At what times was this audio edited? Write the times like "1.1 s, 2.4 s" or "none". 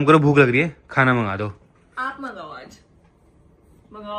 none